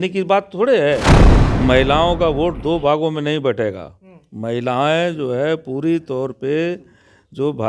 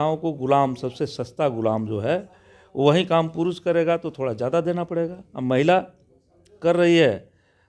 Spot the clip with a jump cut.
first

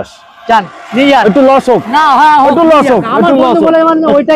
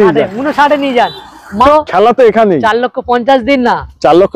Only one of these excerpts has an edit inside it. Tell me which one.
second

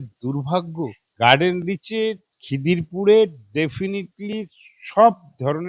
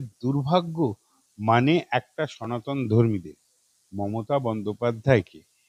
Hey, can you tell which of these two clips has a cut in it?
first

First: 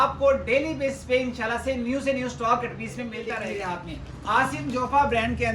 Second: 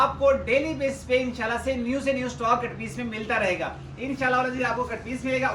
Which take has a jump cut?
first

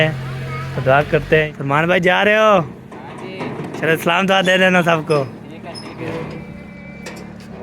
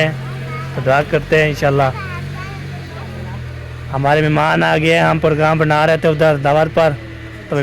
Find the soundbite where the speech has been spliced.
first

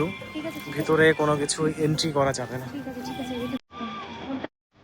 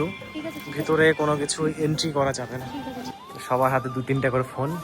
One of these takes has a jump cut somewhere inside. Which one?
second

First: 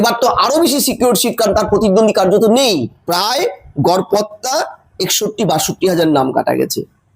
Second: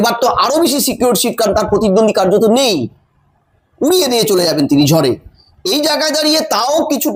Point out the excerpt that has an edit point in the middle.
first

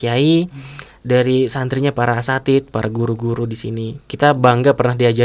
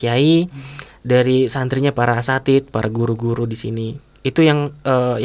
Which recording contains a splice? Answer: first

